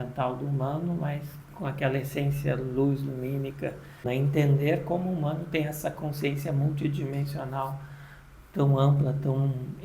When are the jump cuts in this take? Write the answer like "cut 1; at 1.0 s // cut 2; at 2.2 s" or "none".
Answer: cut 1; at 4.0 s